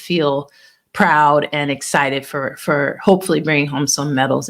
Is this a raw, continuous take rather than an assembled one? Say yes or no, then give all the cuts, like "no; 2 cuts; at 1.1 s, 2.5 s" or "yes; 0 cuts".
yes; 0 cuts